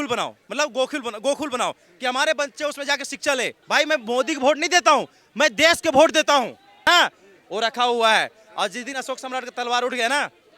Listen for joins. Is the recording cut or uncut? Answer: cut